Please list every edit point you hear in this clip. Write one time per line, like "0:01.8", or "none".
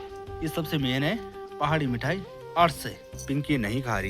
0:03.1